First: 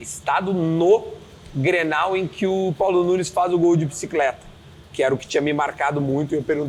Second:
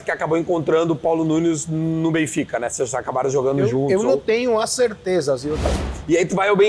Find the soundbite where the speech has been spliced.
second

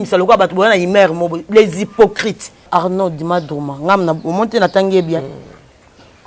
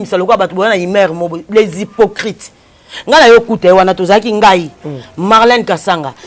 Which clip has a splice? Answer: first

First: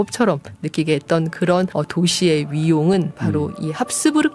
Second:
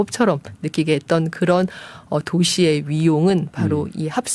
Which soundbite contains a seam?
first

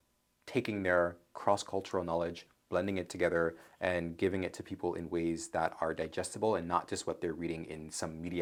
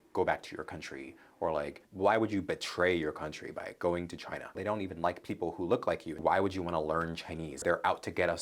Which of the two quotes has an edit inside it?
second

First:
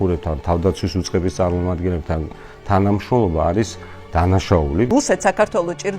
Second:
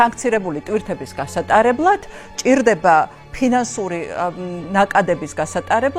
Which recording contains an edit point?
first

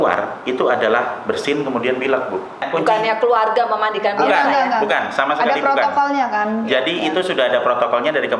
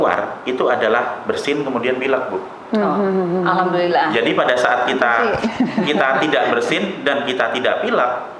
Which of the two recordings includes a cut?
first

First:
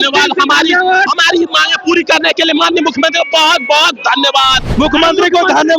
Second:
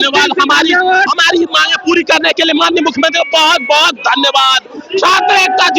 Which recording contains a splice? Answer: first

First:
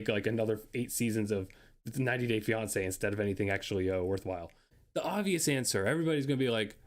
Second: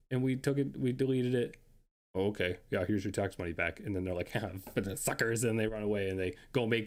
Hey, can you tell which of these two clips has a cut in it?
first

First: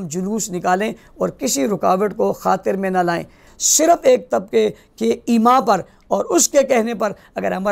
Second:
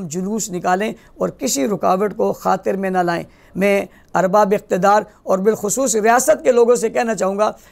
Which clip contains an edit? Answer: first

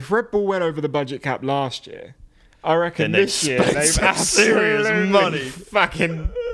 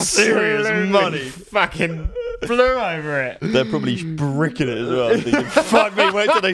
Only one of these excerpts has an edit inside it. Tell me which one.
second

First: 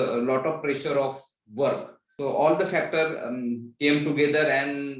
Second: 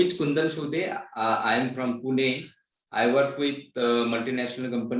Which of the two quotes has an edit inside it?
first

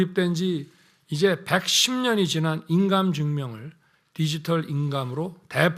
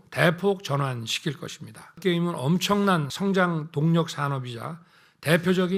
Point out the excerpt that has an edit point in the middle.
second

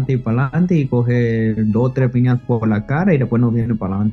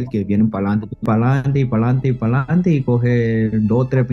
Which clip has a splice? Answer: second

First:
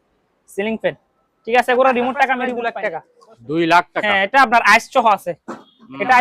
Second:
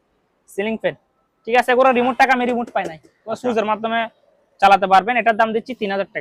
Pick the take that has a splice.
first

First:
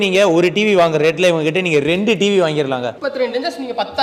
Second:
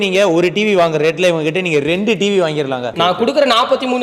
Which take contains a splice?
second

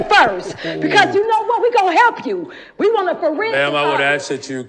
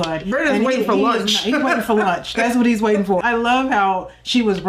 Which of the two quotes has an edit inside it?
second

